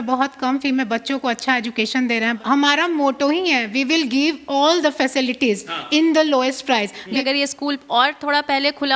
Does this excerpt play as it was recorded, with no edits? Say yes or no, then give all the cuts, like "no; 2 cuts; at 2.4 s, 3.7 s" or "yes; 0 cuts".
no; 2 cuts; at 2.4 s, 7.2 s